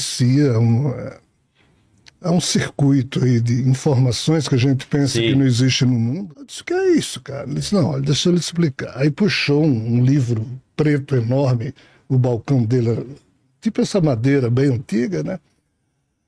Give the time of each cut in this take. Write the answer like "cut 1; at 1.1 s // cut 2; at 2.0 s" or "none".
cut 1; at 6.1 s